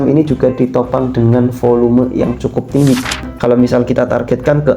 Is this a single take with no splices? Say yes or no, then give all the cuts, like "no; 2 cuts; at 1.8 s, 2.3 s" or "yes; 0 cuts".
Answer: no; 1 cut; at 3.3 s